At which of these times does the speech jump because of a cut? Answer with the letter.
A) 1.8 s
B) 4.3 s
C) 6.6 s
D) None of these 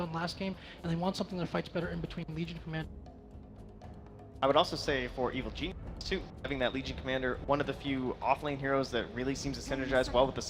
A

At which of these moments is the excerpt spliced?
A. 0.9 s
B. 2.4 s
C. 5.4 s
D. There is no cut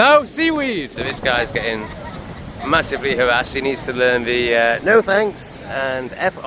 A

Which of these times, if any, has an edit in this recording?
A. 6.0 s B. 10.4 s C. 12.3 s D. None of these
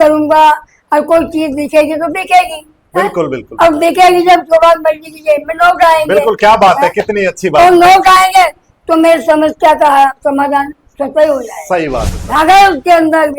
C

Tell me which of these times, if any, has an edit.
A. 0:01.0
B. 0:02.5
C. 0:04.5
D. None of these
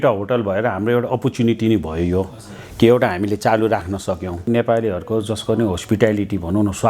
C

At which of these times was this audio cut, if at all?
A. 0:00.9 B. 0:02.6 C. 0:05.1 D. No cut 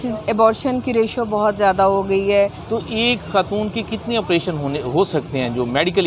B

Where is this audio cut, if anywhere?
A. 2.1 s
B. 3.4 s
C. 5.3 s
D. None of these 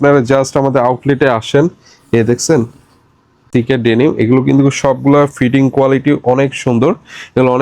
B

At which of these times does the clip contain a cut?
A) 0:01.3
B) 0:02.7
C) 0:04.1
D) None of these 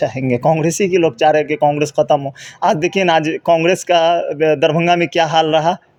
D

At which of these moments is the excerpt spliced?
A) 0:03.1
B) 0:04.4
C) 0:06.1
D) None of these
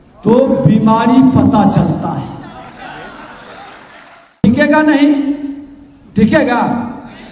B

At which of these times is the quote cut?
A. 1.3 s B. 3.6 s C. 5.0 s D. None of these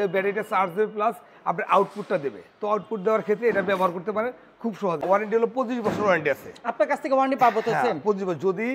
C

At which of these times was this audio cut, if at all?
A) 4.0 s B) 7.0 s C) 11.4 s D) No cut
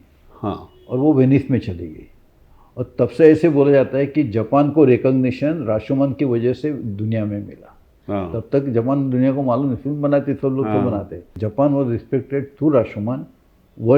C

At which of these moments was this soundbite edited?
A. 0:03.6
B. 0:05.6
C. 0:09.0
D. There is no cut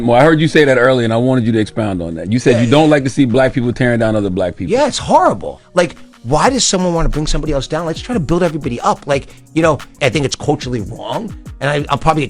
D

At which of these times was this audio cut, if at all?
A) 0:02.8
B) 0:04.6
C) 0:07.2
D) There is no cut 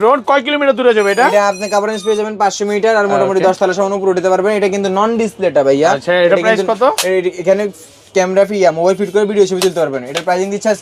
D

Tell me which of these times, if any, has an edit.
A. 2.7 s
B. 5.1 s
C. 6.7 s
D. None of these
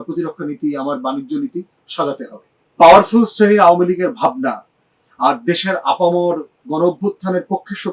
A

